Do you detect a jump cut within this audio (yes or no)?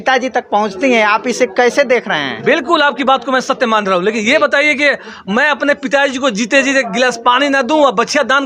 no